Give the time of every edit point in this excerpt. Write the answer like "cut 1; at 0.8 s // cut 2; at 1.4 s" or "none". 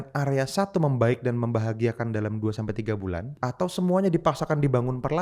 cut 1; at 3.3 s